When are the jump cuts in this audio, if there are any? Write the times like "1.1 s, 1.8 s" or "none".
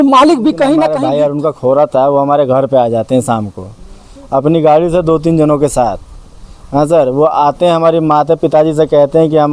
0.9 s